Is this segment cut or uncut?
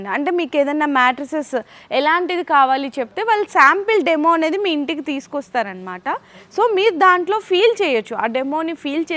uncut